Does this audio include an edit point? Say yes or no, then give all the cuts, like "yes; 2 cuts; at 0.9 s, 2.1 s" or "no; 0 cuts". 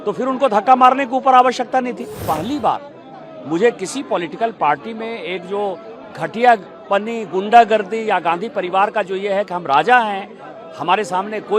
yes; 1 cut; at 2.2 s